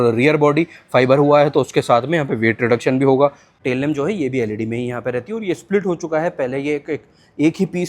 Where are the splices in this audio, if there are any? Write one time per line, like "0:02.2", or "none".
0:03.5